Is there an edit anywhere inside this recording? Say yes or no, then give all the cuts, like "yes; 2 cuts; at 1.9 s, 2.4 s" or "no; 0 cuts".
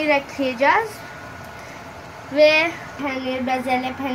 yes; 1 cut; at 2.9 s